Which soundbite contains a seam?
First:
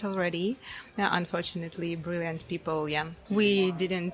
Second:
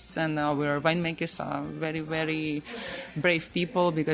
first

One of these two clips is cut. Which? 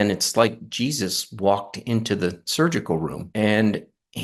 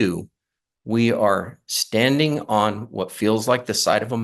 first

